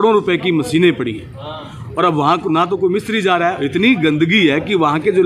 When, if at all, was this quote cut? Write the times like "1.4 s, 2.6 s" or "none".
none